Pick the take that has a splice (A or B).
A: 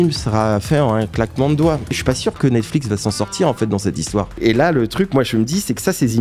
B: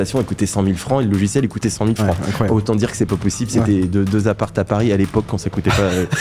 A